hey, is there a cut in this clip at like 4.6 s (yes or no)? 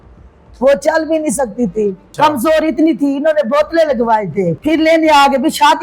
yes